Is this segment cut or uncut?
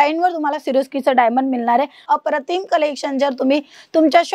cut